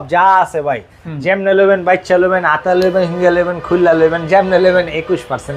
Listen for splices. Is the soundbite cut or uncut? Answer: uncut